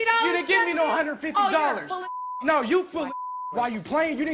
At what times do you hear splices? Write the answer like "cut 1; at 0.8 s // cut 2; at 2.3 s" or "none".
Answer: none